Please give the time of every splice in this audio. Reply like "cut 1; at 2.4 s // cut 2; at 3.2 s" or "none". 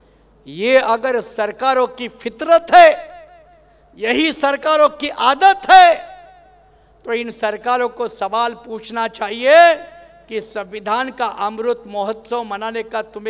none